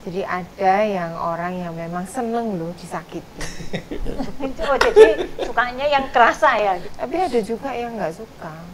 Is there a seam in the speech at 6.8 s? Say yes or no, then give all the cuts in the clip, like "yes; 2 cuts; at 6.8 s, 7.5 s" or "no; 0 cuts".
yes; 1 cut; at 6.8 s